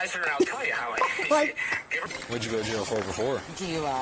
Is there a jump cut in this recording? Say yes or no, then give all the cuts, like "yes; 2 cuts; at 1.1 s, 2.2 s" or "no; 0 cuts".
yes; 1 cut; at 2.0 s